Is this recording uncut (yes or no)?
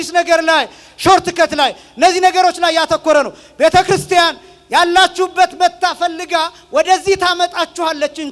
yes